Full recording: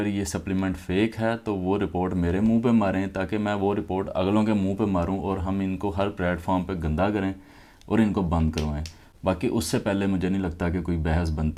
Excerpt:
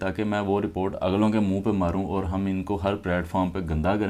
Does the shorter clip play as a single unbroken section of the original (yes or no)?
yes